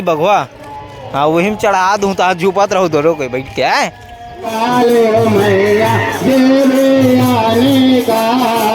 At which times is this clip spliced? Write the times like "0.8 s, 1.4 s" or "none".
4.5 s